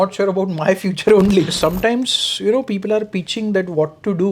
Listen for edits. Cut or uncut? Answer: cut